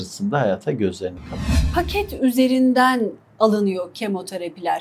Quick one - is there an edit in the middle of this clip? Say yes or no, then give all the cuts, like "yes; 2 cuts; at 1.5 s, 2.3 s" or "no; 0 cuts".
yes; 1 cut; at 1.6 s